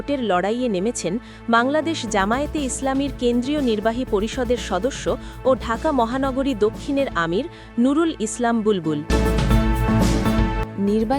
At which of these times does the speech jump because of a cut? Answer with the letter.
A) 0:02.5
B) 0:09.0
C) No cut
B